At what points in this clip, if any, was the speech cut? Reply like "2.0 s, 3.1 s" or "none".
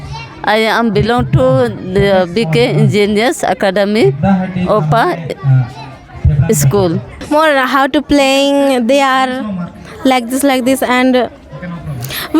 7.3 s